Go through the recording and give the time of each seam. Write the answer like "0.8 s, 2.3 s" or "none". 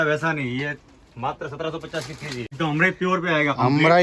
2.5 s

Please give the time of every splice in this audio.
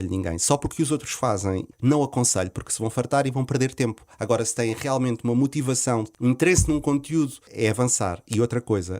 1.7 s, 6.1 s, 7.4 s

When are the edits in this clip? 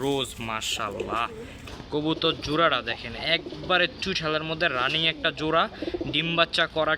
1.7 s

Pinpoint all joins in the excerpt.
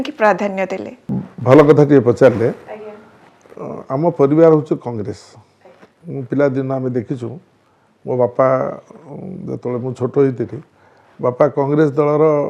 none

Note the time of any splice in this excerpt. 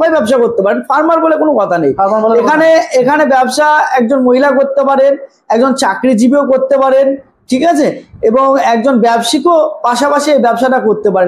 none

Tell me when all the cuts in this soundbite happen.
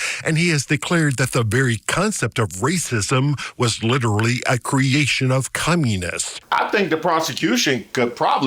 6.3 s

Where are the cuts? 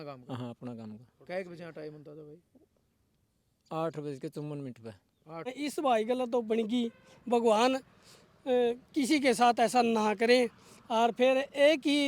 5.5 s

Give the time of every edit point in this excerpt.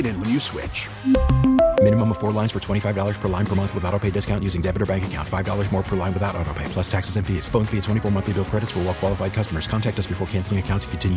none

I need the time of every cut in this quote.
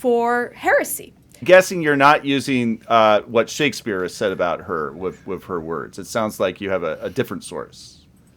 1.4 s

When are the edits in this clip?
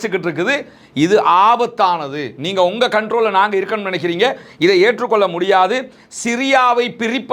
none

